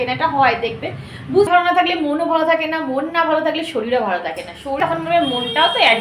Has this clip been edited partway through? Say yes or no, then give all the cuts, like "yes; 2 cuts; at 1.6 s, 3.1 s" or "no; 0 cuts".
yes; 2 cuts; at 1.5 s, 4.8 s